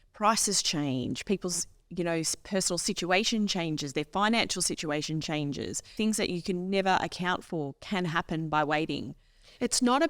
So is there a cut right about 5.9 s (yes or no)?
yes